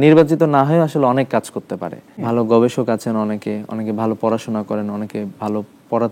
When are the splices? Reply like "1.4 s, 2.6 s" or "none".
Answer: 2.1 s

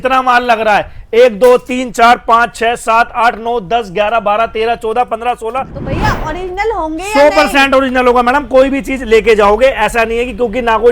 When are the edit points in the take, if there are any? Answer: 5.7 s

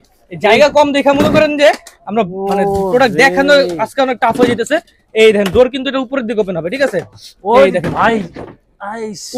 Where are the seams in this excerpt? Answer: none

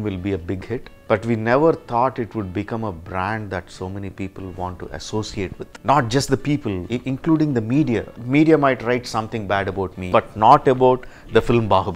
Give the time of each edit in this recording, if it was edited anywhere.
0.9 s, 5.7 s, 6.9 s, 8.1 s, 10.1 s

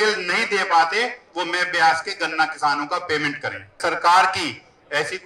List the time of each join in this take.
3.7 s

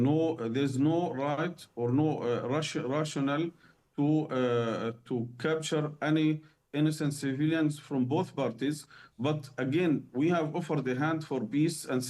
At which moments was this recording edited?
10.0 s

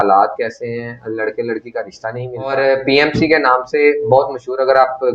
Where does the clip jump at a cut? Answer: 2.5 s

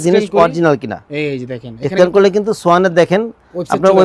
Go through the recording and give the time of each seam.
none

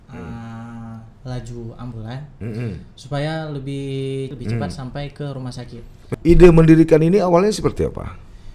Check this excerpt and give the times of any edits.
4.3 s, 6.1 s

